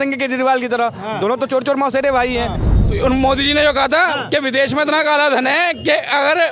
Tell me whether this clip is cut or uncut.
cut